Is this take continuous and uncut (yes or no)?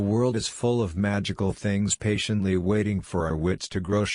yes